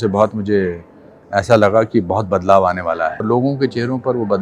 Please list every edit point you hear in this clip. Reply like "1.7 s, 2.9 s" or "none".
3.2 s